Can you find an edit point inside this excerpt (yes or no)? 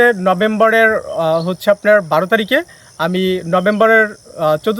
no